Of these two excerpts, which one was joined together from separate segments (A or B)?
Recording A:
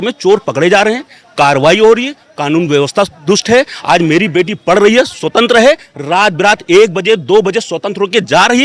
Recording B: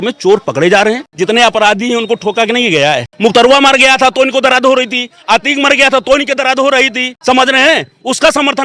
B